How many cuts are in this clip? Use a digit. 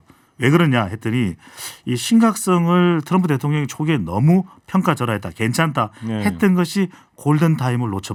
0